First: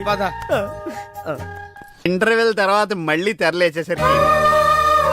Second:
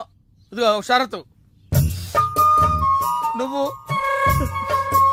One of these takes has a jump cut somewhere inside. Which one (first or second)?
first